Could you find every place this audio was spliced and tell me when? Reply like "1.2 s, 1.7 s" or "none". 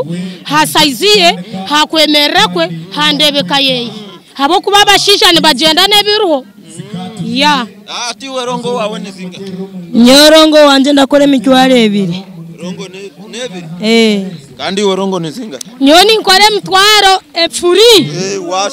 17.4 s